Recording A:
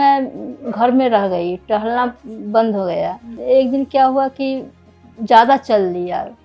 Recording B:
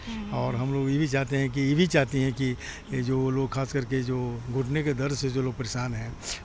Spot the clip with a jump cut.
A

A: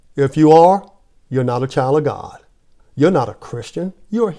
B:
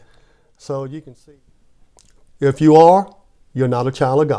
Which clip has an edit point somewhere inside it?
B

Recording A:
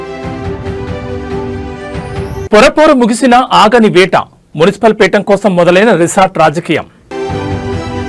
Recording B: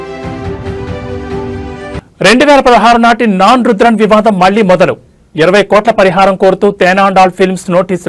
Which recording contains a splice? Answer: A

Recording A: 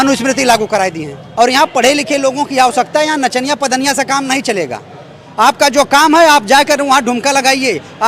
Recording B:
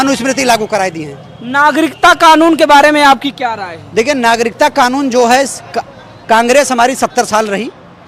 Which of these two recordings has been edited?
A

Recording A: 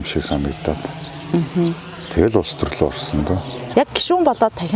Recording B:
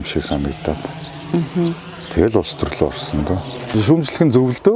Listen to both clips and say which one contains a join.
B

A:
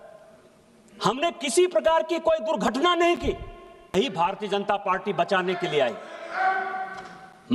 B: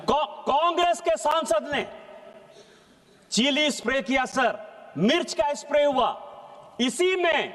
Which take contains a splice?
A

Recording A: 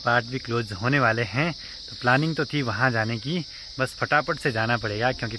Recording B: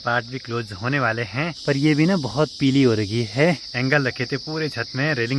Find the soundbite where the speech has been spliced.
B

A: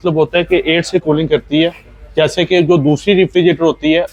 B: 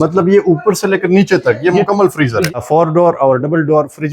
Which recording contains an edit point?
B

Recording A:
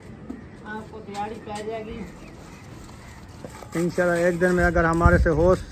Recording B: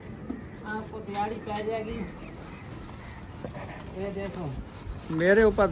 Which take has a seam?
A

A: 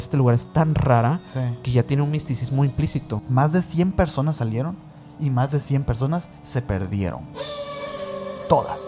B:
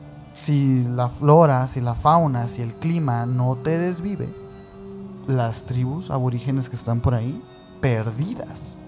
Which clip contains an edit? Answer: A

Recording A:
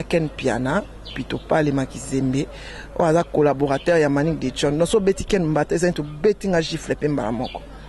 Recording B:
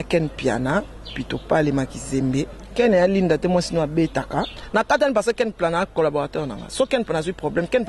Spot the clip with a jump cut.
B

